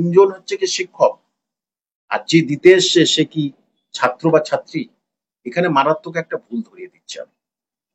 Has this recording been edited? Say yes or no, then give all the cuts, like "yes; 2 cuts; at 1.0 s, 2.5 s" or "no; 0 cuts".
no; 0 cuts